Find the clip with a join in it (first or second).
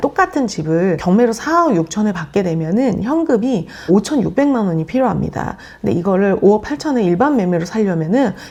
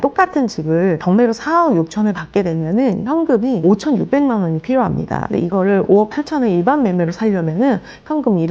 second